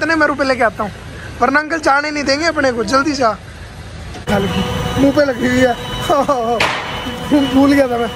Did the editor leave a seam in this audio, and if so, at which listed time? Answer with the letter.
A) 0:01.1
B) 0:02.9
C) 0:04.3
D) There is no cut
C